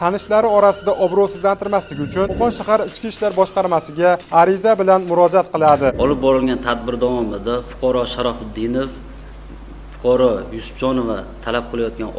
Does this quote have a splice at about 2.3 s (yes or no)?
yes